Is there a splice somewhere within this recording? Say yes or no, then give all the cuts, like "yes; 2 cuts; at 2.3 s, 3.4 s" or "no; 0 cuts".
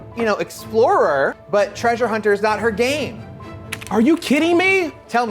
yes; 1 cut; at 1.4 s